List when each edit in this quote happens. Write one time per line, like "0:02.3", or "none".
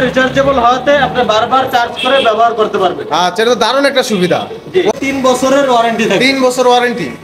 0:04.9

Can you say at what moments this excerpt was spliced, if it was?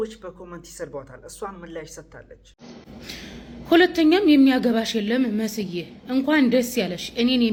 none

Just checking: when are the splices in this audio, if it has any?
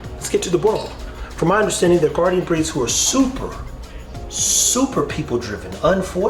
none

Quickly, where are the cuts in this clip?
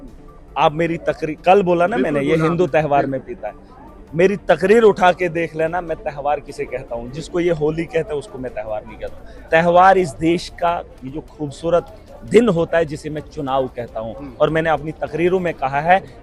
none

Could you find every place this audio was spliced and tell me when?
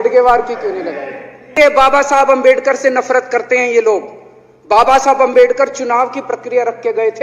0:01.6

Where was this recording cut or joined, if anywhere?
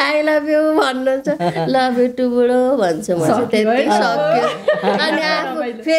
none

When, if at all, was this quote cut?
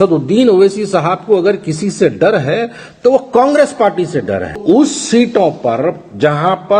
0:04.6

